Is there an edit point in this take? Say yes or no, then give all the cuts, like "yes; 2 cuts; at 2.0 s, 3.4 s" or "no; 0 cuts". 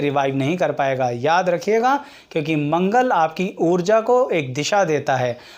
no; 0 cuts